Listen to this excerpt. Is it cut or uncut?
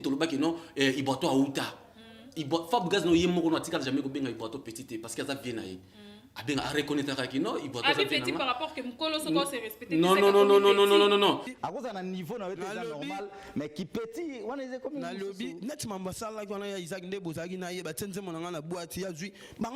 cut